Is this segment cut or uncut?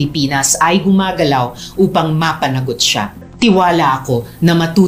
cut